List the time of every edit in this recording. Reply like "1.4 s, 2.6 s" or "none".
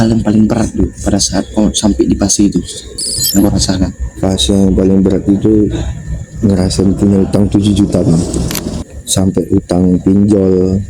9.0 s